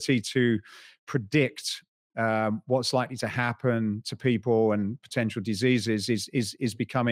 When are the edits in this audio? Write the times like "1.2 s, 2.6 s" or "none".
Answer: none

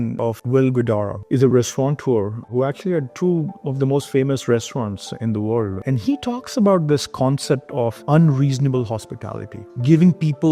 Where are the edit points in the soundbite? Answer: none

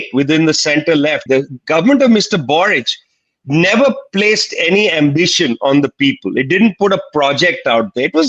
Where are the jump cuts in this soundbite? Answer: 1.3 s

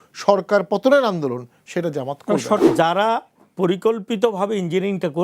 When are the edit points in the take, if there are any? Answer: 2.6 s

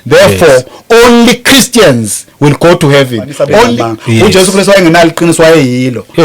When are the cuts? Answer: 3.7 s

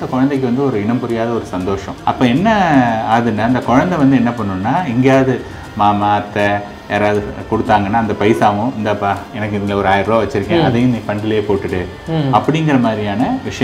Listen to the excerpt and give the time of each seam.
1.9 s

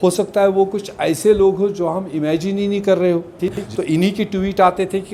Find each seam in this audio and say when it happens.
3.6 s

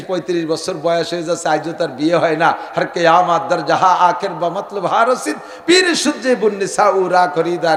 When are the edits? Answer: none

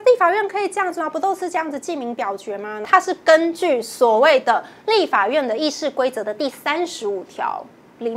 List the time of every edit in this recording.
2.9 s

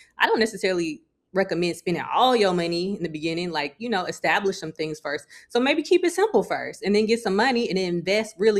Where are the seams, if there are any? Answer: none

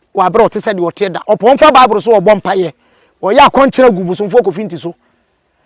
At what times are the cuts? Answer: none

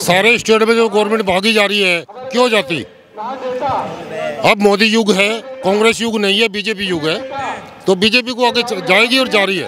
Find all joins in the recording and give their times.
none

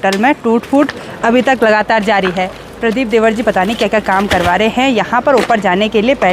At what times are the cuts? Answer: none

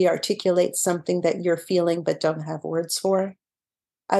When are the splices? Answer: none

